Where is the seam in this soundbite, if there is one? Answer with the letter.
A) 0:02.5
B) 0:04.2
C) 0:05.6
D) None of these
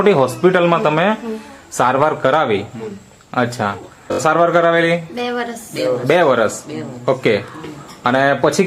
B